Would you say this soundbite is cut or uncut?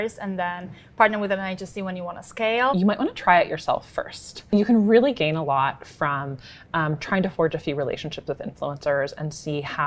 cut